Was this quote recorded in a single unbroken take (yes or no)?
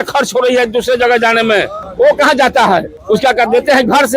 no